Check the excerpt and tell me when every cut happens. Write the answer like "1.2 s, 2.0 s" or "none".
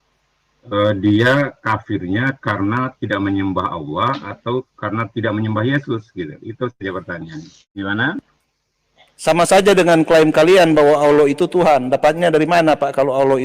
7.6 s